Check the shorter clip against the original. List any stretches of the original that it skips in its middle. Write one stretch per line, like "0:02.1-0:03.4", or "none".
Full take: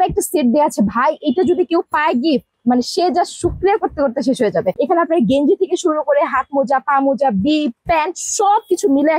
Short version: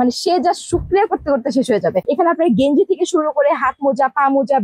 none